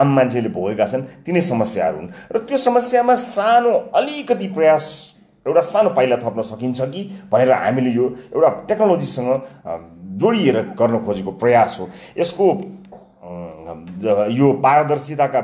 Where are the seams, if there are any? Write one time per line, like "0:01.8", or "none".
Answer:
none